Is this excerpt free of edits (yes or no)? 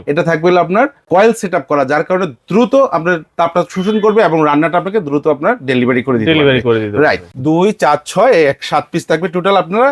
no